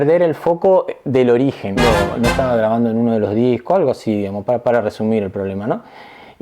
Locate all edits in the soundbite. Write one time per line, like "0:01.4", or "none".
0:01.8